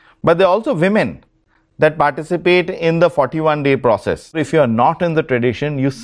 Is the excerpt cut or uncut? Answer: cut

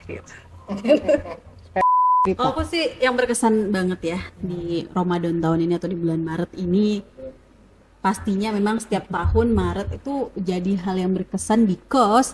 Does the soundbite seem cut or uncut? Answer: cut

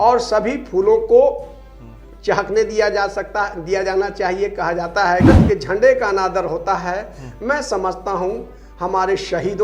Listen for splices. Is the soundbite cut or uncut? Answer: cut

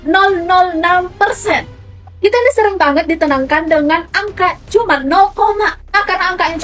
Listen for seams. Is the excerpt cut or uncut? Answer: uncut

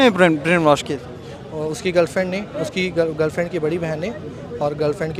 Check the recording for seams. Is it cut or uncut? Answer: uncut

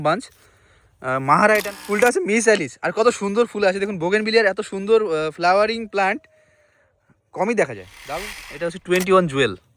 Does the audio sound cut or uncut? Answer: cut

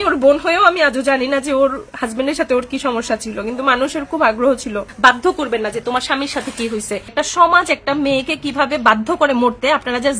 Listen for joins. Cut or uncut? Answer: cut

